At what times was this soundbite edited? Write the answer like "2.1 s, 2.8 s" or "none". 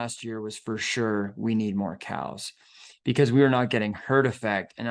none